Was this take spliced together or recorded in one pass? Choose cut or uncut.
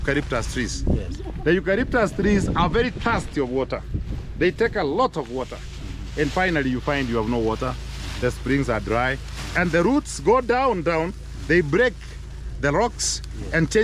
uncut